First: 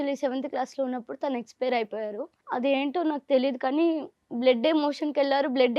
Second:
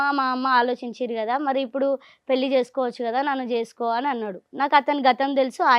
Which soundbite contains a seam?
first; 1 cut; at 2.3 s

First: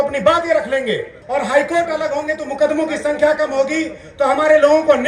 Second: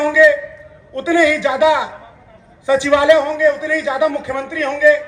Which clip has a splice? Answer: first; 1 cut; at 1.1 s

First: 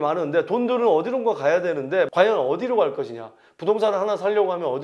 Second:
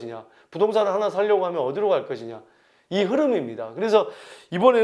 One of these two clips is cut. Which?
first; 1 cut; at 2.1 s

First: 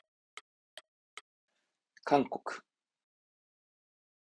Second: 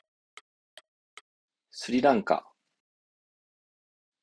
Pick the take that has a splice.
first; 1 cut; at 1.3 s

